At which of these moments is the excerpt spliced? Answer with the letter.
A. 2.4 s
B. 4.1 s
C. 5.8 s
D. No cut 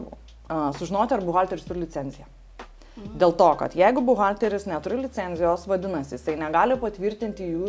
D